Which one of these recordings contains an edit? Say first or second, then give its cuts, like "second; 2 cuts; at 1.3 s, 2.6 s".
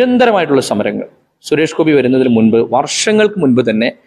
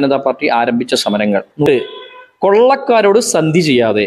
second; 1 cut; at 1.6 s